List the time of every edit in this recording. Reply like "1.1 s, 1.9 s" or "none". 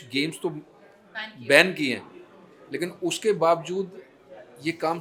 none